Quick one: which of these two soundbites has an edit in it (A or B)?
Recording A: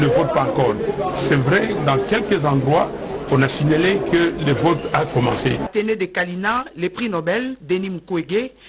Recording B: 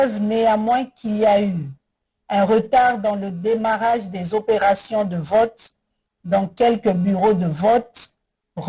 A